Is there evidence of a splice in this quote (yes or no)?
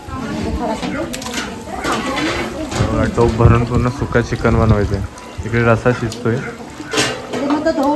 no